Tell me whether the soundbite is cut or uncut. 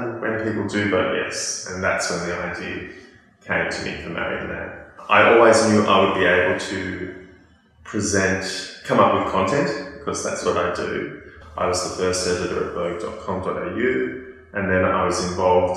cut